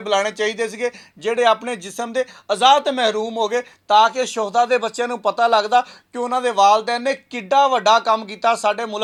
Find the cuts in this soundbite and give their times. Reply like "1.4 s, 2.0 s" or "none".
none